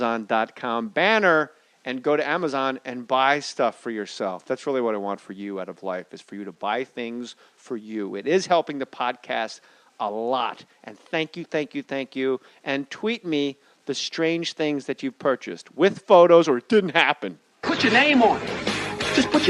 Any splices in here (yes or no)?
no